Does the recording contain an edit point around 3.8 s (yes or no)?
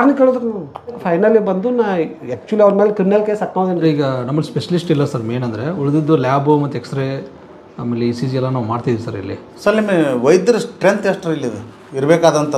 yes